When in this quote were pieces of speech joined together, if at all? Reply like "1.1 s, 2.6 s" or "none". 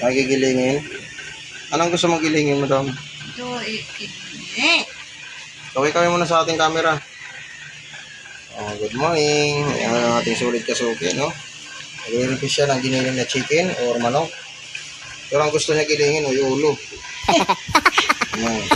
17.4 s